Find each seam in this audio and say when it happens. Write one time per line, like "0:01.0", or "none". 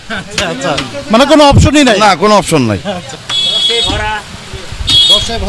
0:03.1